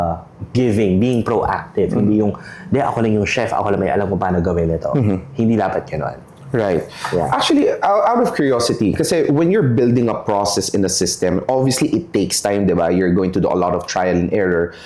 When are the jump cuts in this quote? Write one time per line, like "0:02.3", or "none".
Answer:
none